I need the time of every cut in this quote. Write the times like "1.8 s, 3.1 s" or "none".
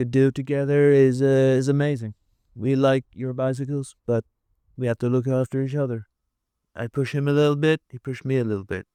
none